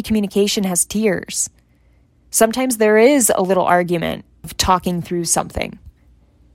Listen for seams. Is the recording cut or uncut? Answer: cut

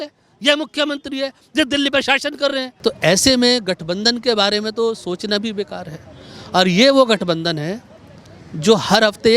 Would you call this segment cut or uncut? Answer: cut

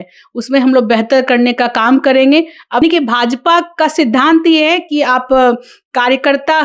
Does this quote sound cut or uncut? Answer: cut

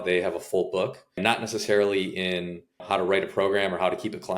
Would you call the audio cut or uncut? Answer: cut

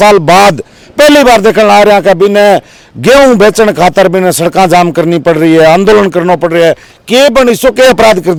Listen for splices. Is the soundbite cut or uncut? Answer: uncut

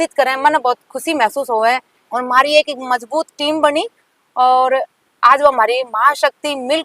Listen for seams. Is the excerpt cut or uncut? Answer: cut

